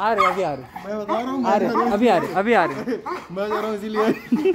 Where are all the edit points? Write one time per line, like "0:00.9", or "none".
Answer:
none